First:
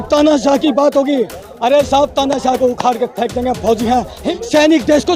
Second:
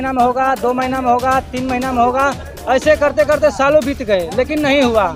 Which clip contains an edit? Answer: first; 1 cut; at 4.2 s

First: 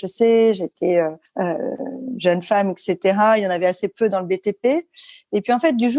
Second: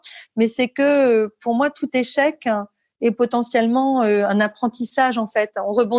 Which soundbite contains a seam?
first; 1 cut; at 1.2 s

